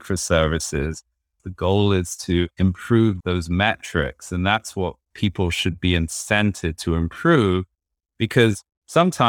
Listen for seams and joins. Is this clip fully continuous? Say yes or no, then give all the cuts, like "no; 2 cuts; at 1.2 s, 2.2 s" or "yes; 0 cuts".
no; 1 cut; at 1.4 s